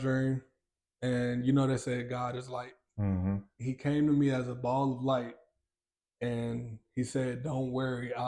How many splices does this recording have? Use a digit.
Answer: 1